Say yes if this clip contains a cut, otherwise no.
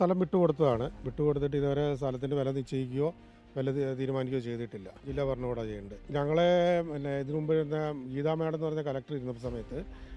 yes